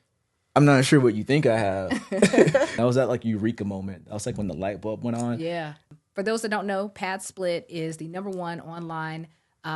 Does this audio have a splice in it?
yes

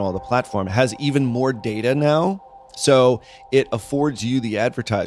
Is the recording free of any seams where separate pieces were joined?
yes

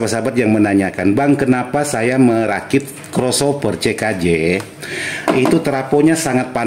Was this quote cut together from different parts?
no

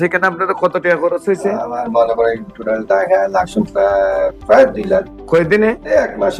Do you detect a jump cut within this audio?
no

